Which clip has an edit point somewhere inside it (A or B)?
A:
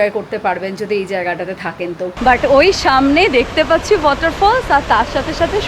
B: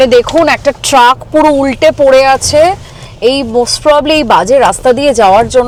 A